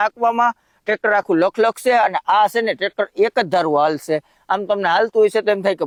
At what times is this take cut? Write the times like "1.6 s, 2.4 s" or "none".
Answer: none